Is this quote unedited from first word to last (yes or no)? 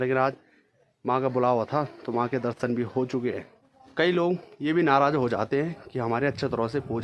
no